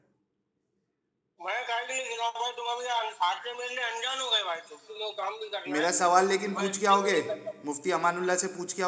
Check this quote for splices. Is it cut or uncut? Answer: cut